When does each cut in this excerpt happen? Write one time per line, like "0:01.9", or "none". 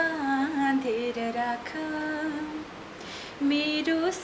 none